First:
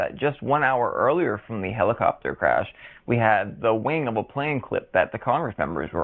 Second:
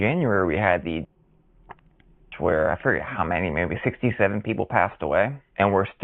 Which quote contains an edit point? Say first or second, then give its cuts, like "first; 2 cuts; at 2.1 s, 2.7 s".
second; 1 cut; at 2.8 s